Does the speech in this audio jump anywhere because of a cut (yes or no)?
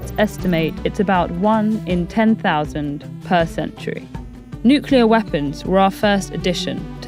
no